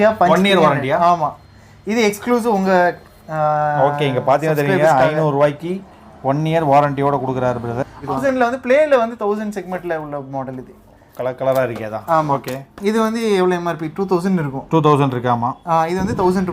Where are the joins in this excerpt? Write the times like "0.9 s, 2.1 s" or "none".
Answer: 8.1 s